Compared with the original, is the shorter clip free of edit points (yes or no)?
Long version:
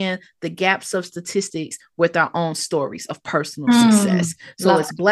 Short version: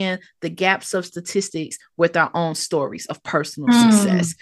yes